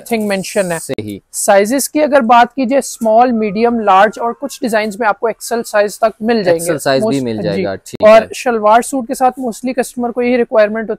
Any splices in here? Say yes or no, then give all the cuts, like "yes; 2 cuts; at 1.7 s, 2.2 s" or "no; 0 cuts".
no; 0 cuts